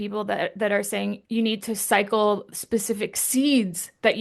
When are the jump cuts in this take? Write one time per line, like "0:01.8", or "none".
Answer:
0:01.2